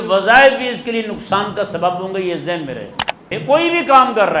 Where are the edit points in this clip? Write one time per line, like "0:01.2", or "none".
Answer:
0:03.3

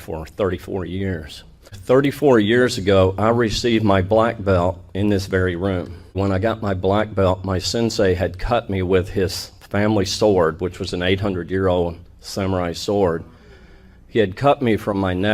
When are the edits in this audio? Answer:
0:06.1

